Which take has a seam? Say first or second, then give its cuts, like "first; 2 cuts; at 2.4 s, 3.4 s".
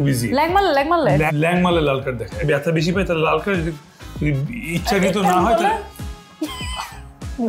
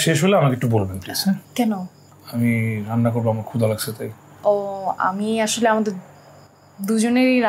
second; 1 cut; at 1.5 s